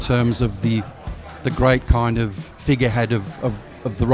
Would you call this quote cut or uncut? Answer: uncut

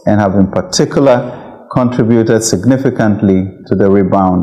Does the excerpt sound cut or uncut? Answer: uncut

